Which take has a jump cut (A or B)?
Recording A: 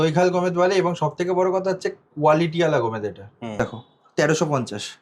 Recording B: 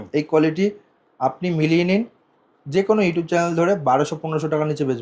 A